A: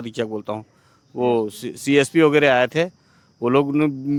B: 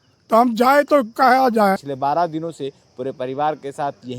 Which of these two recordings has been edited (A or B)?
B